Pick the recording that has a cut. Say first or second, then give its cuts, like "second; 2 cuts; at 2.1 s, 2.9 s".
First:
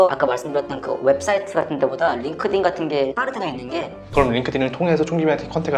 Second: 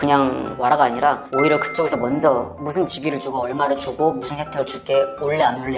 first; 1 cut; at 4.1 s